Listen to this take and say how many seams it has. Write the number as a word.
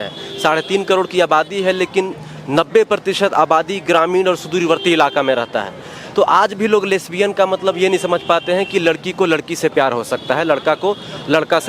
zero